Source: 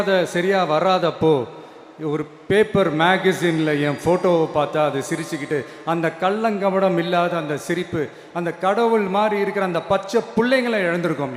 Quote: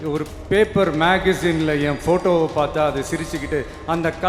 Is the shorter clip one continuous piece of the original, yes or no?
yes